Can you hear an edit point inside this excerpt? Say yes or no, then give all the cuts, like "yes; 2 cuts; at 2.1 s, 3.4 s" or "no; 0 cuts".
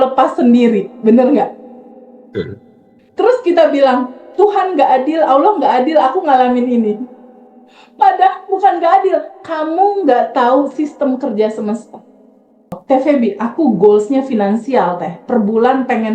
yes; 1 cut; at 12.7 s